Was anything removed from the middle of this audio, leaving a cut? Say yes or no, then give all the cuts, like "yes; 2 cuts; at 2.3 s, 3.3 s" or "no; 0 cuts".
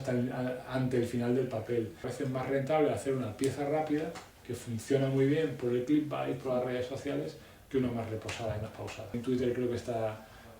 yes; 2 cuts; at 2.0 s, 9.2 s